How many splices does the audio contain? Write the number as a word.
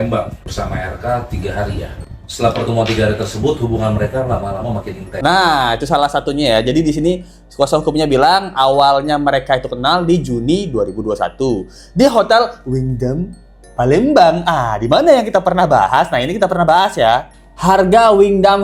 zero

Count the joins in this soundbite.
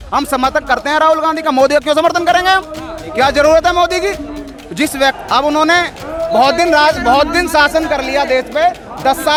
zero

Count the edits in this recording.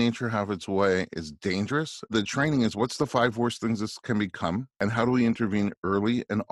two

